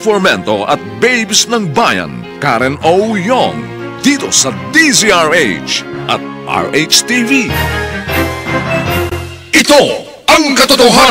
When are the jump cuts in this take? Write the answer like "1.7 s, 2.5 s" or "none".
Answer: none